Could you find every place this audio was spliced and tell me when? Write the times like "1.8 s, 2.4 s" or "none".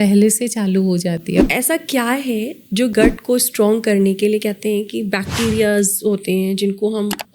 1.4 s, 2.9 s